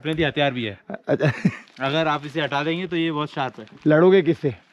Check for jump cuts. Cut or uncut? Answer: uncut